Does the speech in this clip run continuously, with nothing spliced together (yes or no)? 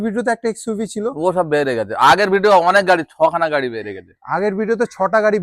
yes